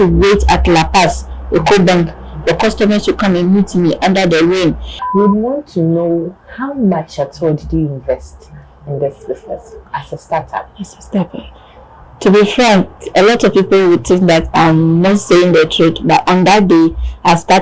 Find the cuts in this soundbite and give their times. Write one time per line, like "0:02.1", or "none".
0:04.9